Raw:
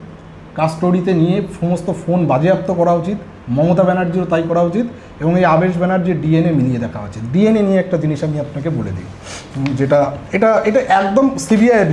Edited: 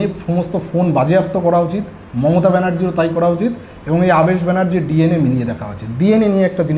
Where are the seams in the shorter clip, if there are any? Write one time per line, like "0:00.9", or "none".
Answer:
none